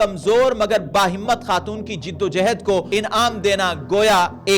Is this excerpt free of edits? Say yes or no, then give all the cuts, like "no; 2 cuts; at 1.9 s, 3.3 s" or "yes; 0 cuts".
no; 1 cut; at 2.9 s